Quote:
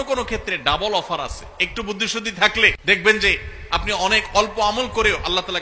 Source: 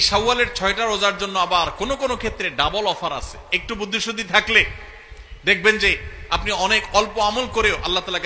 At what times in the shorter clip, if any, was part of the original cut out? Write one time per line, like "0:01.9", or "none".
0:02.8